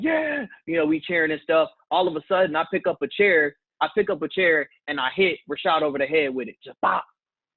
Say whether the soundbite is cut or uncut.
uncut